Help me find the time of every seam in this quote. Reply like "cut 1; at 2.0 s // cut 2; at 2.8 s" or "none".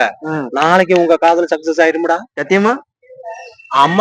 none

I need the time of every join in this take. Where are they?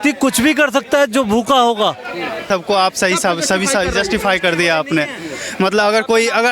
cut 1; at 2.4 s

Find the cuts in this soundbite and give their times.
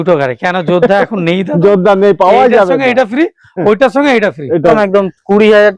cut 1; at 4.7 s

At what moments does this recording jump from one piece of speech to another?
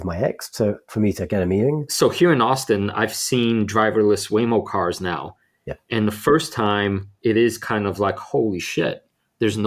cut 1; at 1.9 s

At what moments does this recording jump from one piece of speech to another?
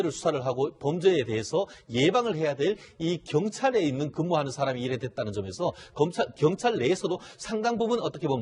cut 1; at 5.1 s

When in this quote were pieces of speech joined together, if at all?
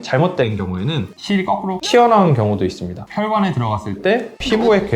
cut 1; at 3.0 s

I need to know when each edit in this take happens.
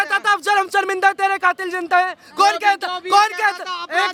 none

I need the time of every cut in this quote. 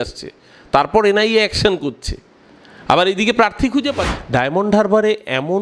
cut 1; at 4.1 s

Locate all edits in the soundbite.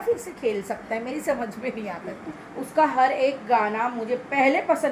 cut 1; at 2.2 s

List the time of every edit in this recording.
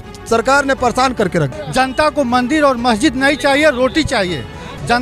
cut 1; at 1.6 s

